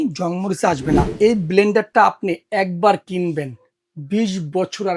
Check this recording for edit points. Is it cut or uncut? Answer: cut